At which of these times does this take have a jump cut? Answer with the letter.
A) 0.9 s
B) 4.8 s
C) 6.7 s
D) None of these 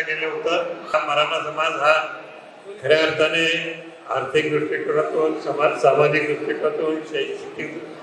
A